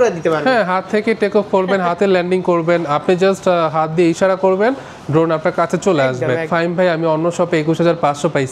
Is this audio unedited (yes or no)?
no